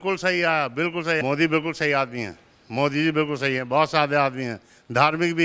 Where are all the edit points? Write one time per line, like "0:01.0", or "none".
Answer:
0:01.1